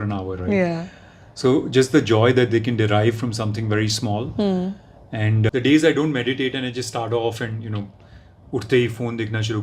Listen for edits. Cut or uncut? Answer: cut